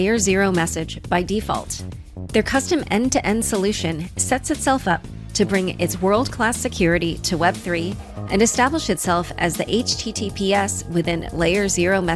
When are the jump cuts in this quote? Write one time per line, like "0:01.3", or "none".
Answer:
none